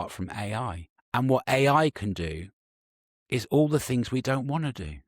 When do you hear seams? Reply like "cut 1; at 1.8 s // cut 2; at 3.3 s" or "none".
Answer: cut 1; at 0.9 s